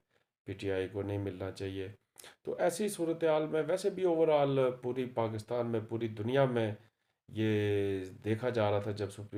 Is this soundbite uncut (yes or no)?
yes